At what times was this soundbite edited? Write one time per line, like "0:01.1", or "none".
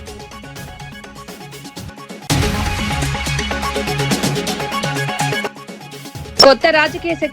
0:01.4
0:02.2
0:05.4

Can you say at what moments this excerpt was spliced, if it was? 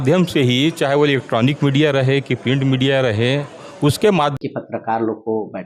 0:04.4

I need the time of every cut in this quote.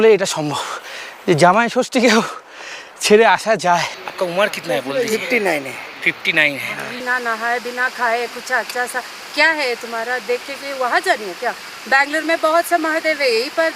0:04.0
0:07.0

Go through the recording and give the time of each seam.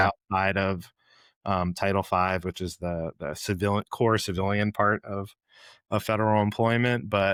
none

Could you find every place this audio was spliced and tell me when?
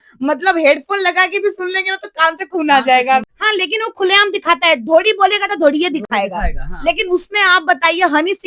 0:03.3

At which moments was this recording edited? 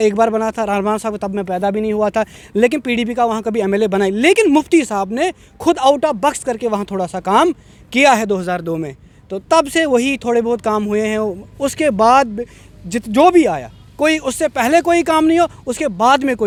none

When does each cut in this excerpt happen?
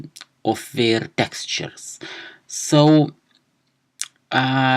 0:02.4

